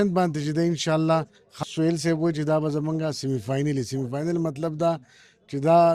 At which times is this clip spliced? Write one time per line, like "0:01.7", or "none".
0:01.6